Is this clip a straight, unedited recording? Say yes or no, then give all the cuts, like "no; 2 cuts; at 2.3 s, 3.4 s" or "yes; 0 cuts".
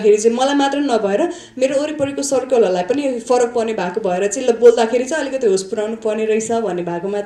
yes; 0 cuts